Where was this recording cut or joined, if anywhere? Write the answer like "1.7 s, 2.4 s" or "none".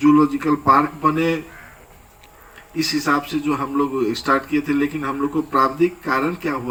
none